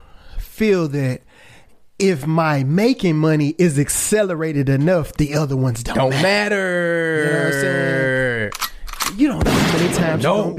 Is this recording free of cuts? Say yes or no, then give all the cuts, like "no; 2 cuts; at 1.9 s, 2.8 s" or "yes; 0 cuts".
yes; 0 cuts